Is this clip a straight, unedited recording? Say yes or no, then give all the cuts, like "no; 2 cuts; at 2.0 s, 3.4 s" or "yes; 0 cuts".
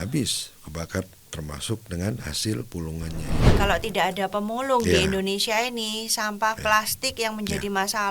no; 1 cut; at 3.4 s